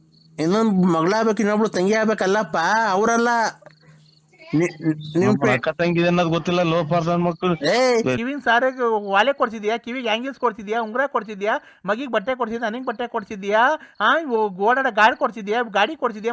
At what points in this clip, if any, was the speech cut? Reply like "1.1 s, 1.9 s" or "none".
8.2 s